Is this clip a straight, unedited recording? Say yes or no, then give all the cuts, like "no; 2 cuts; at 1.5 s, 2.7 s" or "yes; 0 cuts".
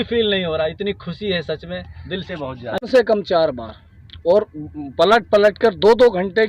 no; 1 cut; at 2.8 s